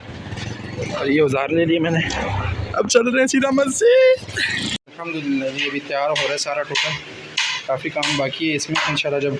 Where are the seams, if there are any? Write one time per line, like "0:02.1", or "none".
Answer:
0:04.9